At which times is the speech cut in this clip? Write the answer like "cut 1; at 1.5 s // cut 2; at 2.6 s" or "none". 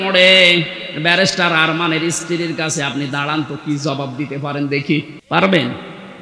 cut 1; at 5.2 s